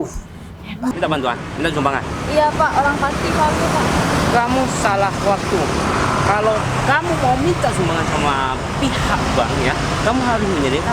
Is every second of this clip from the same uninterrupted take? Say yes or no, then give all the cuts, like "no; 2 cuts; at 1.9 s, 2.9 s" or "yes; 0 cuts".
no; 1 cut; at 0.9 s